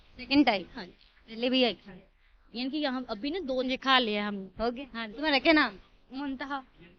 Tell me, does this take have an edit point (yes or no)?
yes